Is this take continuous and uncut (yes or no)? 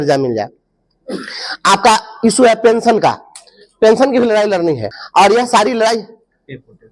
yes